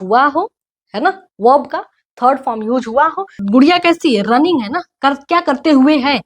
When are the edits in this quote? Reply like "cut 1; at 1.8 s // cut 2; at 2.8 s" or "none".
cut 1; at 3.4 s